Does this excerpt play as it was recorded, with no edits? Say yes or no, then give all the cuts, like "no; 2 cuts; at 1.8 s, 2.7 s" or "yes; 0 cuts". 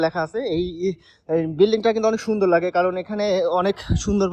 yes; 0 cuts